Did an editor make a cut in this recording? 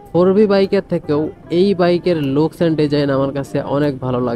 no; 0 cuts

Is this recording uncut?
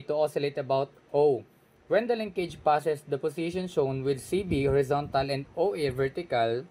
yes; 0 cuts

